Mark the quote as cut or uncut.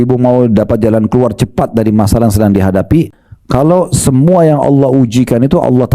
cut